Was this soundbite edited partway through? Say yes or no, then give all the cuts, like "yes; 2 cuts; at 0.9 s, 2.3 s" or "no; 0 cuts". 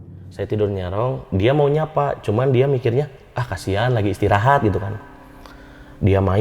no; 0 cuts